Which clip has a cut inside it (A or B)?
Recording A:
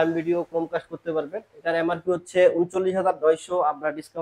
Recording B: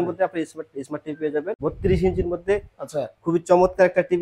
B